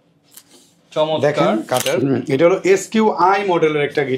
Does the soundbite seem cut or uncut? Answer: cut